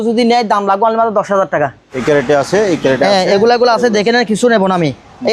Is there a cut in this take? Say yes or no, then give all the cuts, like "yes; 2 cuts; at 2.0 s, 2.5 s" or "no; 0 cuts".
yes; 1 cut; at 1.9 s